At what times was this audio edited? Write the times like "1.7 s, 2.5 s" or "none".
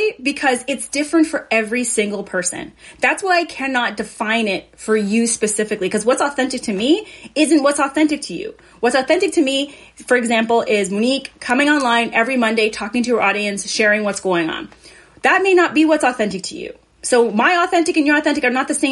none